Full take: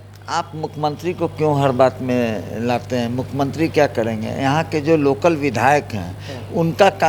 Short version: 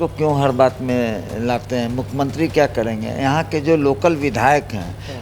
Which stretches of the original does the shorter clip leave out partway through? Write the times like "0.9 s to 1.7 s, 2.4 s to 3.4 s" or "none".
none